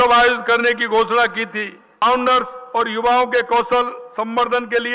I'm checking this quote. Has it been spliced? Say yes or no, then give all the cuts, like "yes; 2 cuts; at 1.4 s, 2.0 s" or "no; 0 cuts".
yes; 1 cut; at 1.8 s